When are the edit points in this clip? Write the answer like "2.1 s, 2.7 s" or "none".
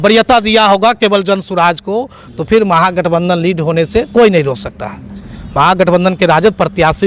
none